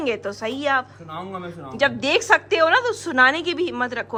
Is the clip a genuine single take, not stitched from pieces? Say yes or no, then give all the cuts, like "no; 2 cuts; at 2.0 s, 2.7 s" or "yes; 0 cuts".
yes; 0 cuts